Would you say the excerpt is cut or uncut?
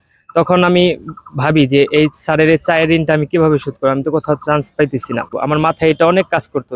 cut